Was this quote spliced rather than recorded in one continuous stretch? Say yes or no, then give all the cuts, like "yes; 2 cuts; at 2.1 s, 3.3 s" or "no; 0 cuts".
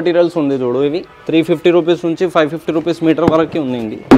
no; 0 cuts